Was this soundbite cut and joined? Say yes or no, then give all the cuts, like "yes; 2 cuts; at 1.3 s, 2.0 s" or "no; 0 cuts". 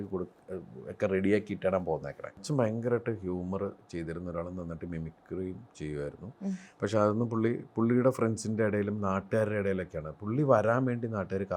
yes; 1 cut; at 2.4 s